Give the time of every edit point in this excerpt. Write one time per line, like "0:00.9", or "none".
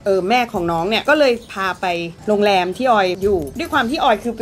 0:01.0
0:03.4